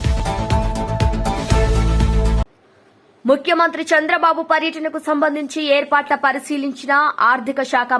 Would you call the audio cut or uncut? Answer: cut